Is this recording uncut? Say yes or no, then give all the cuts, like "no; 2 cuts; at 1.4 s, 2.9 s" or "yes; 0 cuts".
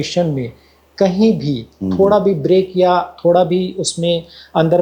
yes; 0 cuts